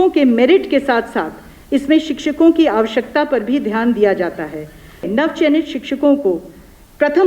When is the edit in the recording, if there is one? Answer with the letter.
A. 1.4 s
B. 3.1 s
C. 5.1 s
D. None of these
C